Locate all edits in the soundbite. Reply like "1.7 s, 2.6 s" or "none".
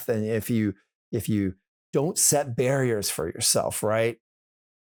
none